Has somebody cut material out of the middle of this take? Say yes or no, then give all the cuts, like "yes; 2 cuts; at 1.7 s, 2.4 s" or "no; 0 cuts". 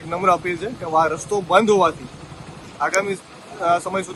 no; 0 cuts